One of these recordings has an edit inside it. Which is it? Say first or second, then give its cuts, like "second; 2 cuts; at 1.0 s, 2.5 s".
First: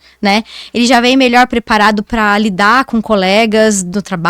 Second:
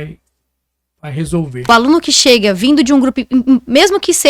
second; 1 cut; at 1.7 s